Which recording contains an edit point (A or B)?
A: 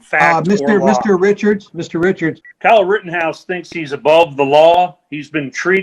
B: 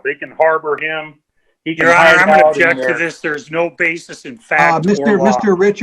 A